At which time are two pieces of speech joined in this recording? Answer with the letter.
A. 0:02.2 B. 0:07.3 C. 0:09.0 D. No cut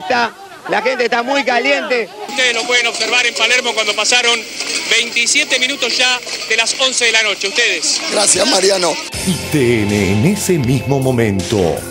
A